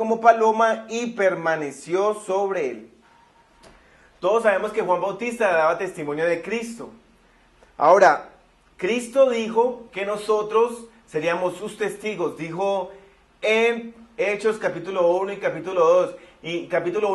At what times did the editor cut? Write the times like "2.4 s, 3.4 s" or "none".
10.5 s